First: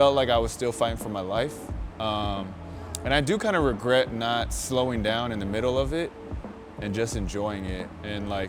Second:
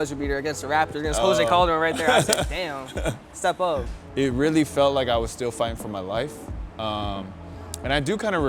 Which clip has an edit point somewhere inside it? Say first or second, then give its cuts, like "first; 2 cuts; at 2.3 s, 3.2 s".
second; 1 cut; at 3.9 s